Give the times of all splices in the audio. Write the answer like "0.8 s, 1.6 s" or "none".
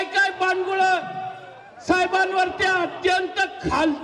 none